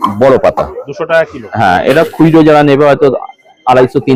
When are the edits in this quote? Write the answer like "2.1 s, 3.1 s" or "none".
none